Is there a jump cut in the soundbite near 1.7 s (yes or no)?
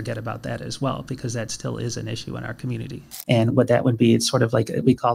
no